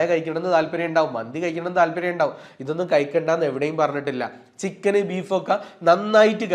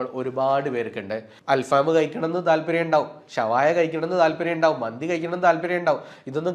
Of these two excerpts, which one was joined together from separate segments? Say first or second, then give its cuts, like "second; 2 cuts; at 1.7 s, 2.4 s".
second; 1 cut; at 1.3 s